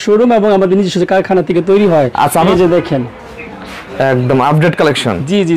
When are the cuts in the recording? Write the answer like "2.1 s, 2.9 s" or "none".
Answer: 2.5 s